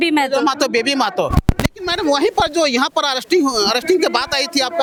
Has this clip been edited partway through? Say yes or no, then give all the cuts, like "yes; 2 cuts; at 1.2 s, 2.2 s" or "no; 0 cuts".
no; 0 cuts